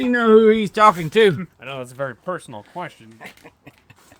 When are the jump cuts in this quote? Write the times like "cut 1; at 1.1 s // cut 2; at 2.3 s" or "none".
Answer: cut 1; at 1.6 s